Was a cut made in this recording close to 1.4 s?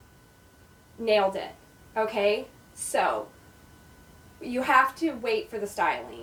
no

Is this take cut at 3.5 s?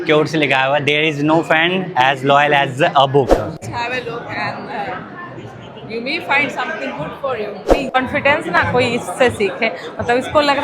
yes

